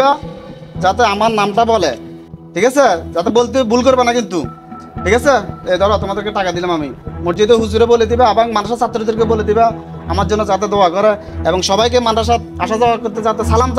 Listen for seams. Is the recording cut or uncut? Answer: uncut